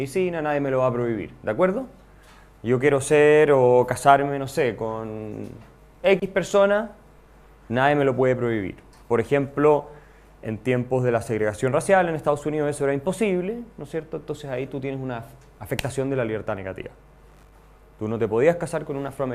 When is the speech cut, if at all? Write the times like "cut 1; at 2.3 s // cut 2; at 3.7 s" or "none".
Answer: cut 1; at 6.6 s